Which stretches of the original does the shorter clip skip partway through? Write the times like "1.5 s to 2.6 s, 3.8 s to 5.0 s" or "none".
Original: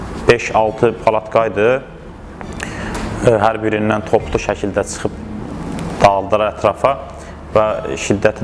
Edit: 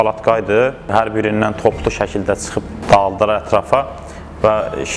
2.0 s to 3.4 s, 5.2 s to 5.9 s

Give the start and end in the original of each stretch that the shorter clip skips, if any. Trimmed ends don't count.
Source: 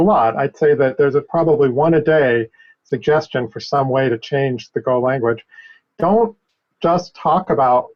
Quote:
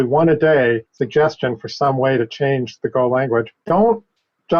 2.5 s to 2.8 s, 5.5 s to 5.9 s

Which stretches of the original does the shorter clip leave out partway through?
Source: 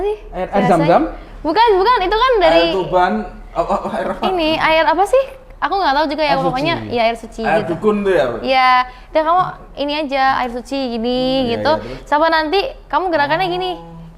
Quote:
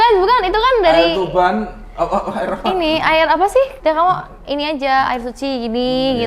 5.3 s to 9.0 s

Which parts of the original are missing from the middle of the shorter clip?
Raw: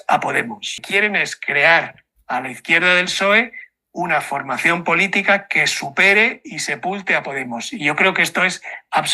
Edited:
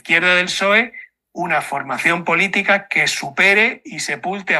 none

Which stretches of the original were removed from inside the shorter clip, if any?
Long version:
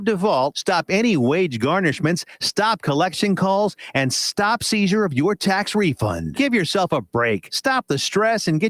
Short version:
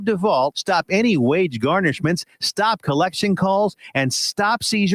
none

